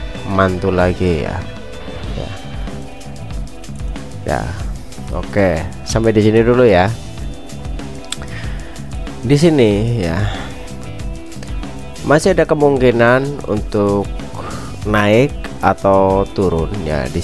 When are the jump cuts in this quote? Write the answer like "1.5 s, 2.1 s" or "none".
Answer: none